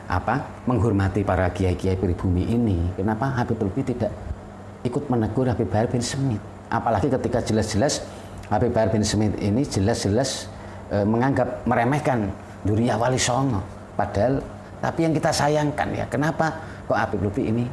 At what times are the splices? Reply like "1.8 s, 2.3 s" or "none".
14.6 s